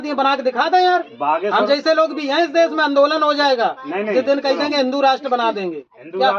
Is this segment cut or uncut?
uncut